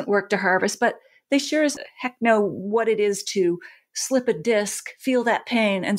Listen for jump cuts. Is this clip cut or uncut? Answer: uncut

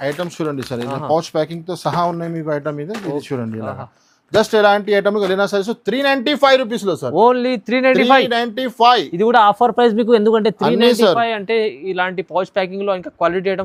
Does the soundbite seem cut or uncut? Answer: uncut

